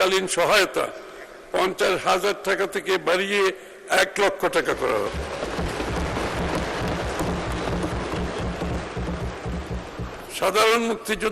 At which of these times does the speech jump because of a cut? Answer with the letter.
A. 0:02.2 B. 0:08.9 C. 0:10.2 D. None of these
C